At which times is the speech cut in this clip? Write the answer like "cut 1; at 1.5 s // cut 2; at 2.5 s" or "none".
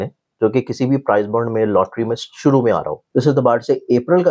cut 1; at 3.0 s